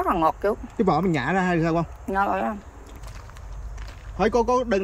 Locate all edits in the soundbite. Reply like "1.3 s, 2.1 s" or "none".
3.0 s